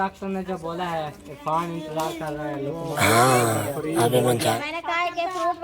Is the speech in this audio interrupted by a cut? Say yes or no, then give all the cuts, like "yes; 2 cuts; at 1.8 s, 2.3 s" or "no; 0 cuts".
yes; 1 cut; at 4.5 s